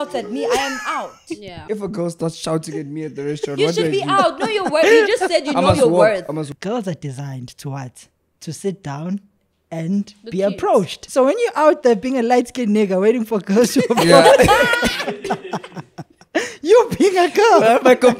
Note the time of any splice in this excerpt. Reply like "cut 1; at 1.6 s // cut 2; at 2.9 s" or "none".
cut 1; at 1.6 s // cut 2; at 6.5 s // cut 3; at 11.0 s